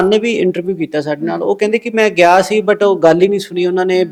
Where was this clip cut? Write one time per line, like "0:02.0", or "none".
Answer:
none